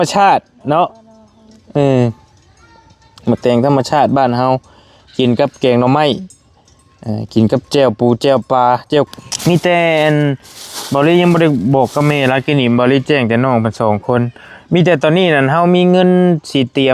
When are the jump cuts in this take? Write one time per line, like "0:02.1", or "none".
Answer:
0:09.1